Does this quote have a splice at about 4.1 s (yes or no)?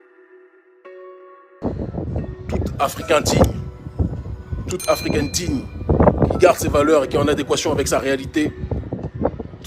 no